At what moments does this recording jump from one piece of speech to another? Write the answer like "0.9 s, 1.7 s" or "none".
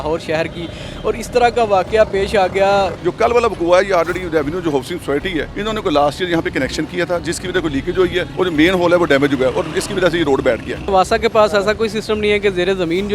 2.9 s, 5.5 s, 8.3 s, 10.9 s